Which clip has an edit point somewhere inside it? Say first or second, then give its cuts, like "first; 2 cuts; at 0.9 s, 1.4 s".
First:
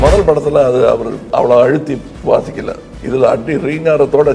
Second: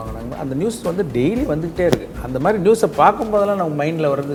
first; 3 cuts; at 1.2 s, 2.1 s, 2.9 s